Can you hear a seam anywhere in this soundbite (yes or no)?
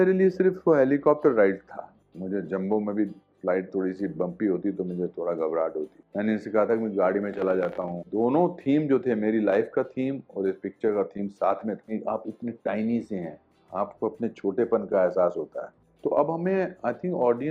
yes